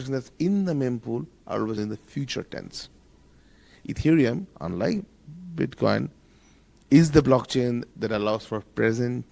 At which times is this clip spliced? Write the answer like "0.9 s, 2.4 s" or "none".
1.8 s, 3.7 s